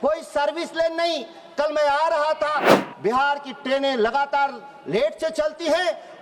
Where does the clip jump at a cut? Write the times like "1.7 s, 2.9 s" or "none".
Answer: 2.8 s